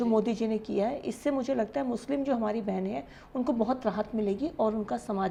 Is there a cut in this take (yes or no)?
no